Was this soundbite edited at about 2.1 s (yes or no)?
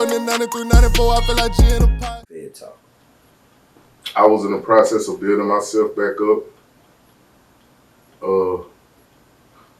yes